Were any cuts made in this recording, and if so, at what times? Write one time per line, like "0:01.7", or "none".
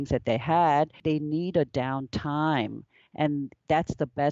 0:01.0